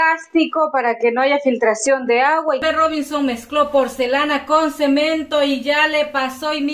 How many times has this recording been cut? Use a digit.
1